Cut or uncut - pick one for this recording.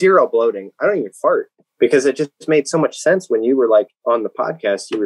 cut